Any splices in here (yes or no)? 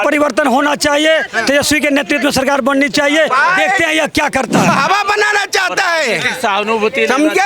yes